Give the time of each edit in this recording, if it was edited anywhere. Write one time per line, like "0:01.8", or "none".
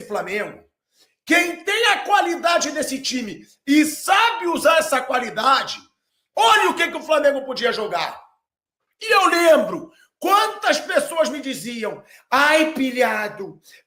none